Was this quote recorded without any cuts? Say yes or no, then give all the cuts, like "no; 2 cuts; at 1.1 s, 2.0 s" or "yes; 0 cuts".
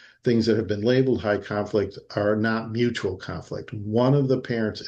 yes; 0 cuts